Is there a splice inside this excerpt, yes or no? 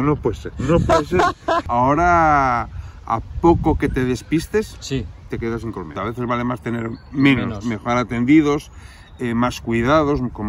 yes